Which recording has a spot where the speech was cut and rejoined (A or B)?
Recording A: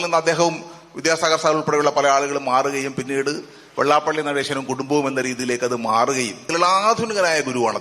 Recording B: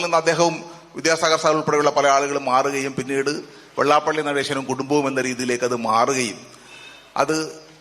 A